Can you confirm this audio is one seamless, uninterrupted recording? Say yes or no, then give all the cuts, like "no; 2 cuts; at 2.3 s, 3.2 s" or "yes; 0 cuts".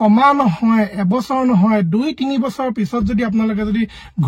yes; 0 cuts